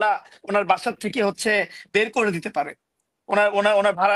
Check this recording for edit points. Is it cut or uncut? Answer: uncut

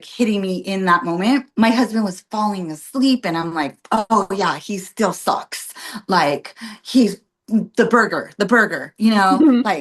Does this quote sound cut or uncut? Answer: cut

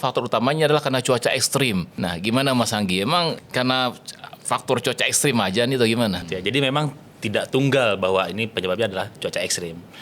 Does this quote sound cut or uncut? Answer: cut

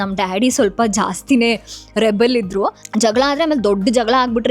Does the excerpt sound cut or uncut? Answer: cut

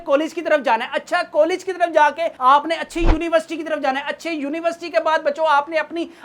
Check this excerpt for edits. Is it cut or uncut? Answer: uncut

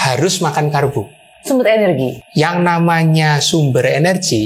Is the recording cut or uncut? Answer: cut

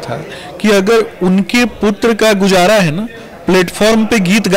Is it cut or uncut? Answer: uncut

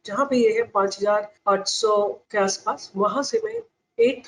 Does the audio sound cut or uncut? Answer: cut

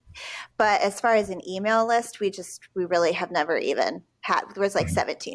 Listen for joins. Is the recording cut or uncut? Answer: uncut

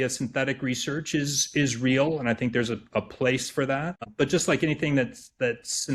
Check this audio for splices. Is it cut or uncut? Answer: cut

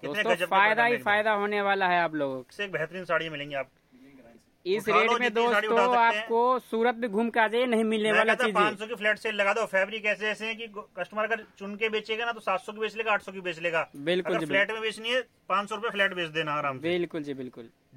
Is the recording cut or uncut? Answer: cut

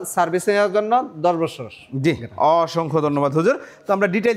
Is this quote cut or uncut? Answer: uncut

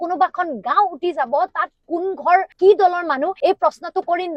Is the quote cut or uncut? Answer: uncut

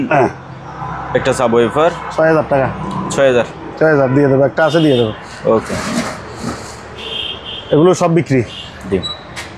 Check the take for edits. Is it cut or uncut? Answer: uncut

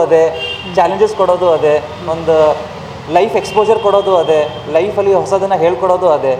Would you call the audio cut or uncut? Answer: uncut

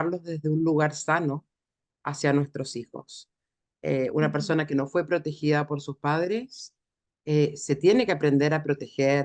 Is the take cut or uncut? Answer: uncut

